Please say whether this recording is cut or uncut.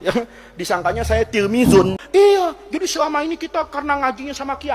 cut